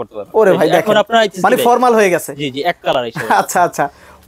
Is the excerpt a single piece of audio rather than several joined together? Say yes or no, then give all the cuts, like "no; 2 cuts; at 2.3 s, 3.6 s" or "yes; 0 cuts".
yes; 0 cuts